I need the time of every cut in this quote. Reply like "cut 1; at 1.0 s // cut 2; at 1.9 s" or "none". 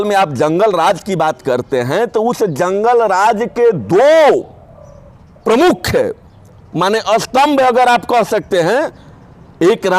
none